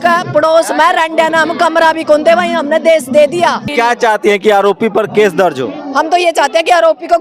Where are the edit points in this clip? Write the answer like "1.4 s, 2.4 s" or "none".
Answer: 3.7 s